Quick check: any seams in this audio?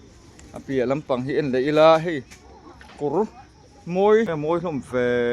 yes; 1 cut; at 4.3 s

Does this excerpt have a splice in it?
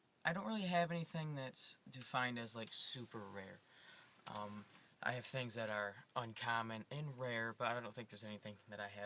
no; 0 cuts

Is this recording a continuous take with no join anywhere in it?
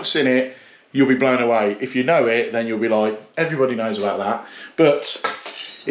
yes; 0 cuts

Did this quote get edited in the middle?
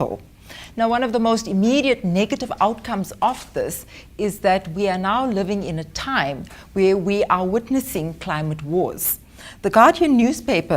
yes; 1 cut; at 9.3 s

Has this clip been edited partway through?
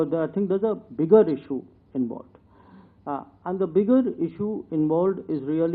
no; 0 cuts

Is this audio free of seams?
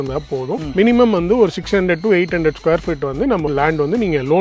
yes; 0 cuts

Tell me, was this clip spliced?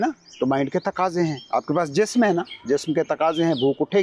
no; 0 cuts

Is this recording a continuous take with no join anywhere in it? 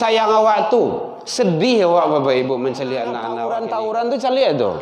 no; 1 cut; at 3.3 s

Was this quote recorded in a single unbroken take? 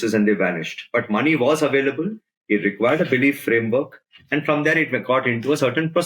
yes; 0 cuts

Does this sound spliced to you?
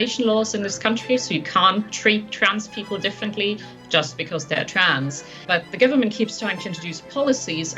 yes; 1 cut; at 5.4 s

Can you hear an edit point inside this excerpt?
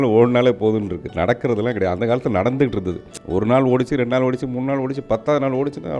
yes; 1 cut; at 3.1 s

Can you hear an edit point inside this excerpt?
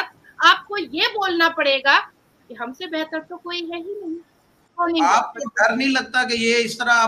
yes; 1 cut; at 4.6 s

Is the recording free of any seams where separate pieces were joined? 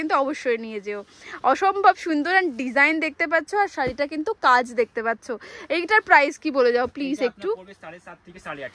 yes; 0 cuts

